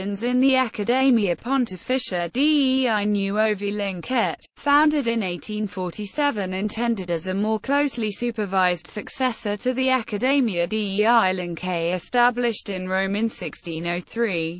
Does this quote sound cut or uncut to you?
cut